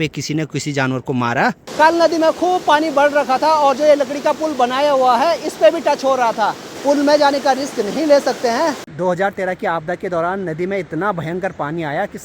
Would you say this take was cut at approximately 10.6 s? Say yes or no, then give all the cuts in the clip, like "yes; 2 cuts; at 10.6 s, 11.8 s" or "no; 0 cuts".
no; 3 cuts; at 1.6 s, 6.6 s, 8.9 s